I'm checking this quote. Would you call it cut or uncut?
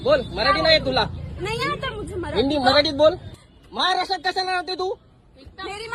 cut